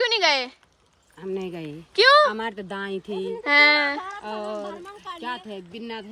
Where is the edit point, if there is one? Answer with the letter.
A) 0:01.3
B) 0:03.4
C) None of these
C